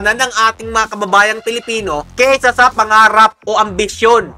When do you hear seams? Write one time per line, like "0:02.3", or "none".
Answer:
none

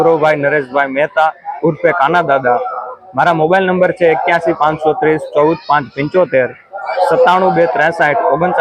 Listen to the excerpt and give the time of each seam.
none

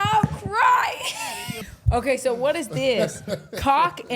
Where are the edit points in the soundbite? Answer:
0:01.6

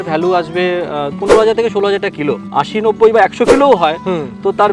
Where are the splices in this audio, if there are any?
0:01.1
0:02.4

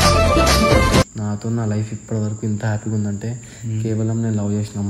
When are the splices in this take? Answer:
0:01.2

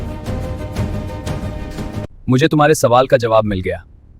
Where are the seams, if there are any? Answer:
0:02.0

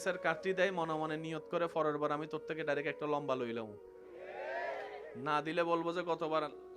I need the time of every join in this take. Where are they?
none

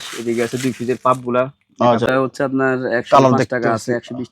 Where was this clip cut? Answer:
0:02.1

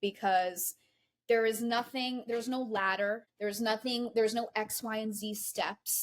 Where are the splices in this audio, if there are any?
0:03.3

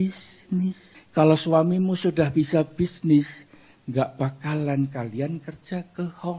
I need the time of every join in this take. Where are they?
0:00.9

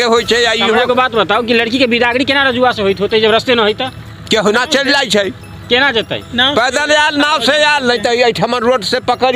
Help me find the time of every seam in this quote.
none

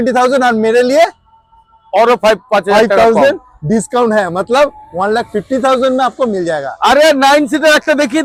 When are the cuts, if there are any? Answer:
none

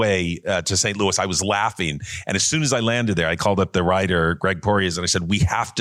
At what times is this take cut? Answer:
none

